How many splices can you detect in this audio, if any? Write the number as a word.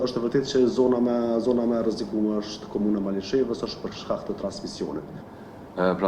one